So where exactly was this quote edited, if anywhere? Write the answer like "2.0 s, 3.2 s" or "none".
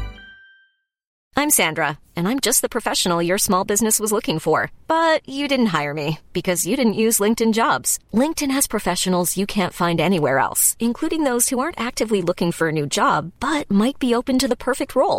1.1 s